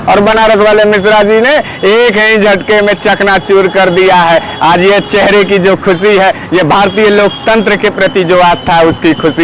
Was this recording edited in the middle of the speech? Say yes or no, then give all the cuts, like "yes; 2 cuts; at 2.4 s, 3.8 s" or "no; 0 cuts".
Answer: no; 0 cuts